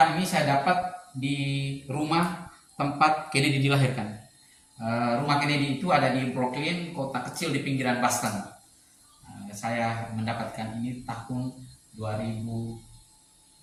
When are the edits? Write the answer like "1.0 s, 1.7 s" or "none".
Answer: none